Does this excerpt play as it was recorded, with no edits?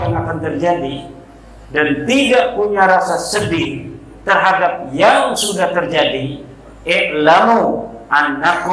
yes; 0 cuts

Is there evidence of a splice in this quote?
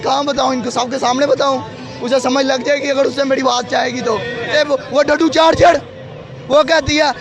yes; 1 cut; at 4.4 s

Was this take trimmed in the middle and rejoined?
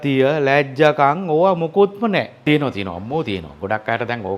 yes; 1 cut; at 2.3 s

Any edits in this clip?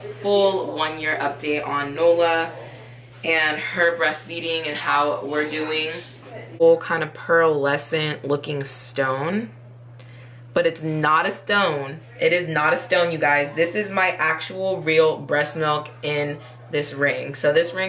yes; 1 cut; at 6.6 s

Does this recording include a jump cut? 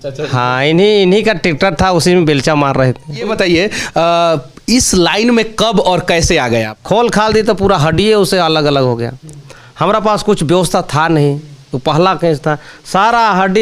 yes; 2 cuts; at 3.3 s, 6.7 s

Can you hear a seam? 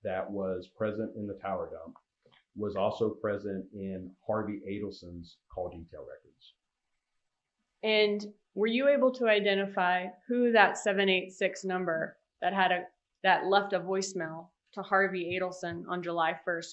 yes; 1 cut; at 7.6 s

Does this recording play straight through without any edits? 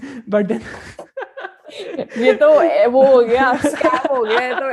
yes; 0 cuts

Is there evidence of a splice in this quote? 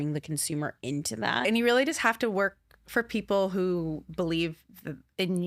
yes; 1 cut; at 1.4 s

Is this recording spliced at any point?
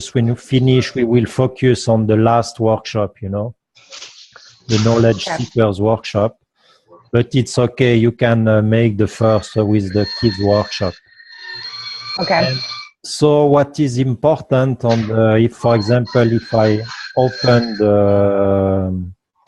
yes; 1 cut; at 5.1 s

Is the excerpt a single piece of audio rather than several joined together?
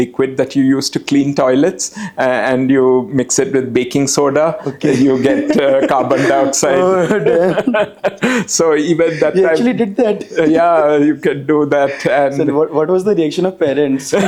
yes; 0 cuts

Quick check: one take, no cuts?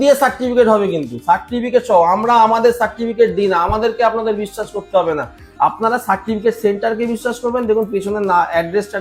yes; 0 cuts

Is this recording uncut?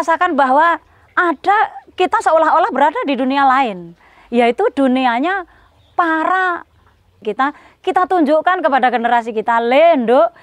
no; 1 cut; at 7.2 s

